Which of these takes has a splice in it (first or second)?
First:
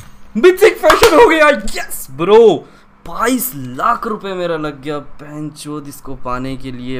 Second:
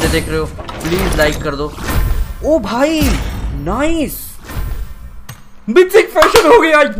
second